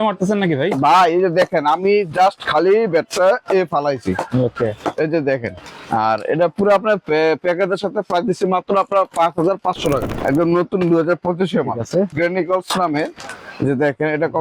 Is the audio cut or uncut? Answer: cut